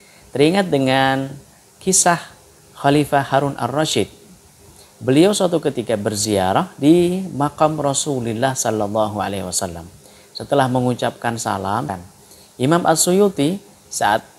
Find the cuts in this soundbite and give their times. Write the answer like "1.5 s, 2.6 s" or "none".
11.9 s